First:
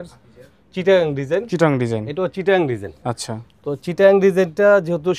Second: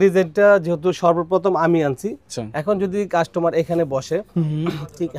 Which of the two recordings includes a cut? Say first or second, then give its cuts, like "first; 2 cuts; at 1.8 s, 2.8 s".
second; 1 cut; at 2.3 s